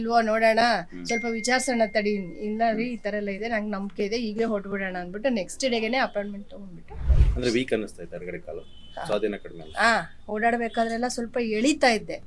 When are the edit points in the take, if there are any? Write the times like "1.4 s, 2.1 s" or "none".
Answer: 7.2 s